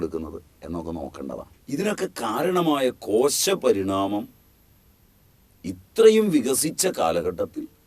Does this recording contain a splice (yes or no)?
yes